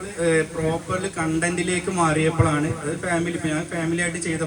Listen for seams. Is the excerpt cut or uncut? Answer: uncut